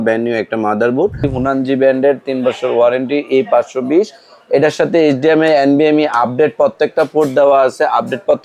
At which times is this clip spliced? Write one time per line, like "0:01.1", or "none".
0:01.3